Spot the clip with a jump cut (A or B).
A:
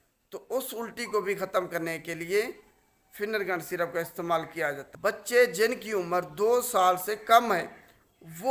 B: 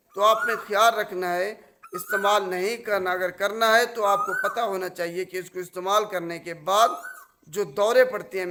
A